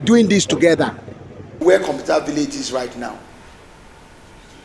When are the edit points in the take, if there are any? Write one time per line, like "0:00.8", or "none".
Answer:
0:01.6